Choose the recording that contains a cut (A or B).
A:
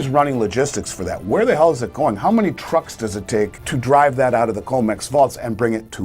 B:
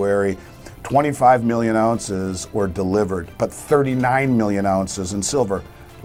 A